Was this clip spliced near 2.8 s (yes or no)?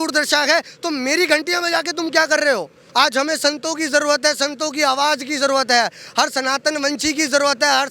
yes